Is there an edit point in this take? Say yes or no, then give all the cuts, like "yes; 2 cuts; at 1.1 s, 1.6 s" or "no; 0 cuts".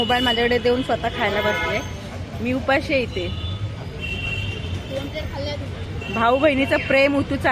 no; 0 cuts